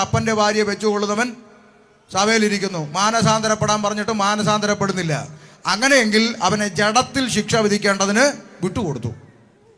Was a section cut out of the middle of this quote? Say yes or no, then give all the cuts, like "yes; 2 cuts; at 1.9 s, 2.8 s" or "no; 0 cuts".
no; 0 cuts